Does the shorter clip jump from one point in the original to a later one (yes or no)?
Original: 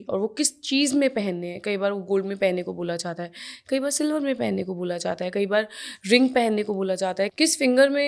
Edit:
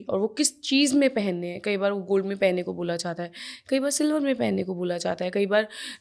no